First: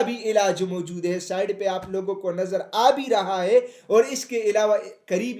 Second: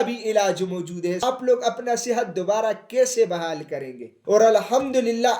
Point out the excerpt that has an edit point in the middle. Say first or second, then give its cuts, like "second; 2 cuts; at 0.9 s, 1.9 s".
second; 2 cuts; at 1.2 s, 4.1 s